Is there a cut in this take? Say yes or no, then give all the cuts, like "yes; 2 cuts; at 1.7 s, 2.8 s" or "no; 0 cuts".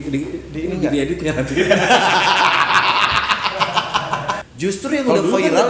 yes; 1 cut; at 4.5 s